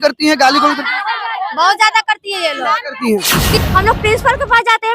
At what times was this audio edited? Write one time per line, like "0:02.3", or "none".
0:03.6